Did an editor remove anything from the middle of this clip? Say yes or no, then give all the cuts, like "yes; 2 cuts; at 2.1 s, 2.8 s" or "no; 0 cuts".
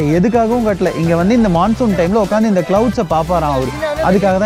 no; 0 cuts